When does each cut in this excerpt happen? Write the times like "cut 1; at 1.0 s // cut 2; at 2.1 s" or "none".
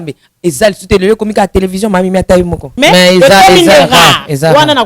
cut 1; at 2.7 s